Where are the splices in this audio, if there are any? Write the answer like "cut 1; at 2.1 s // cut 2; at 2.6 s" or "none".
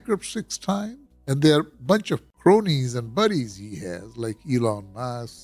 cut 1; at 1.1 s // cut 2; at 2.2 s